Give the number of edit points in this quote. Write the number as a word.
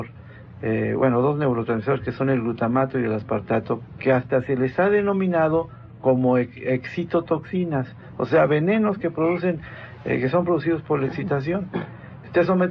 one